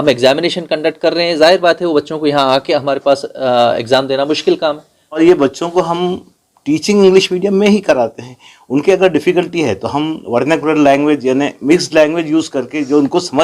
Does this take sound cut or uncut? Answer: cut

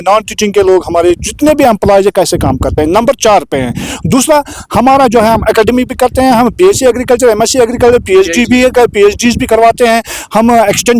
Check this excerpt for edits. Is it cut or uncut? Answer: uncut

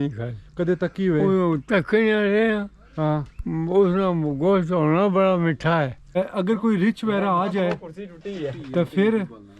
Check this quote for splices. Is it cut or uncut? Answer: cut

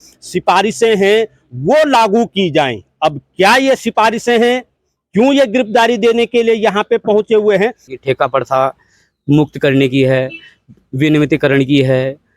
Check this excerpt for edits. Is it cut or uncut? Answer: cut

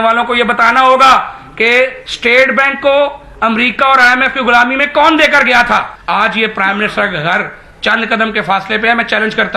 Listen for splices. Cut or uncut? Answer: cut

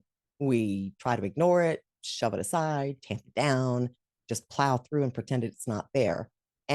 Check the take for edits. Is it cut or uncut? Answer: uncut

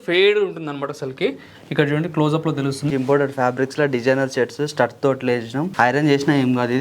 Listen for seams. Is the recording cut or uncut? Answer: cut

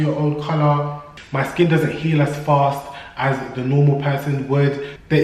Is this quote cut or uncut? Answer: cut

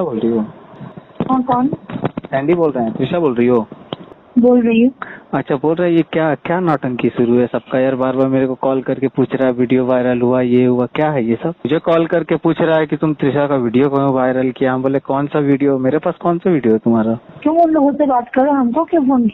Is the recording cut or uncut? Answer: uncut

